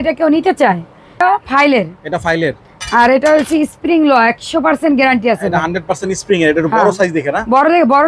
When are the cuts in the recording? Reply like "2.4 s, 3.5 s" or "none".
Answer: 1.2 s